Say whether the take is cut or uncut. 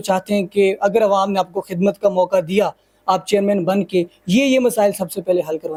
uncut